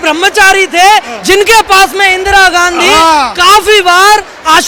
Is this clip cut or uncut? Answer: uncut